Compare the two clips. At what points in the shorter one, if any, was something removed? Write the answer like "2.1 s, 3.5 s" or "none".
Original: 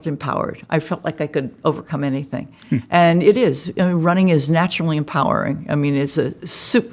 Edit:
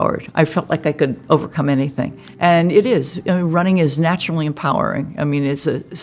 2.3 s